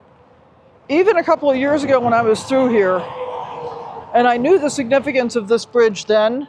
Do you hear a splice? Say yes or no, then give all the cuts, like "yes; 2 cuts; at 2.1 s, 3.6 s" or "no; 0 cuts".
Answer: no; 0 cuts